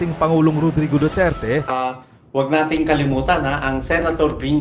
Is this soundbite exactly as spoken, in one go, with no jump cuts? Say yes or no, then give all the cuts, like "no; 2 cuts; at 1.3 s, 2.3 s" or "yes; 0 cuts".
no; 1 cut; at 1.9 s